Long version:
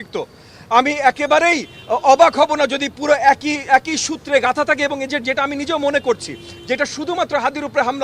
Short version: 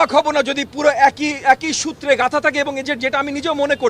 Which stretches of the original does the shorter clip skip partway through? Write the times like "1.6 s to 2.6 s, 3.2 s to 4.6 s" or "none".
none